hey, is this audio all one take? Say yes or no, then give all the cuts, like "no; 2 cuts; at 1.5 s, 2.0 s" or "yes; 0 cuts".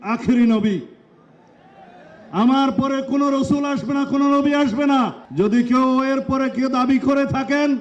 no; 1 cut; at 5.2 s